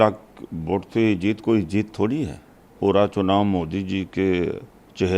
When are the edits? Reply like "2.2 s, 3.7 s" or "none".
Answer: 2.7 s